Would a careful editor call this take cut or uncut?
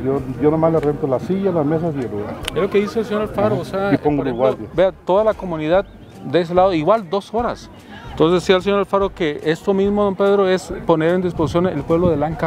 uncut